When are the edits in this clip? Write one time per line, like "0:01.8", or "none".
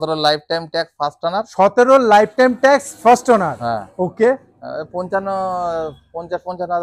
none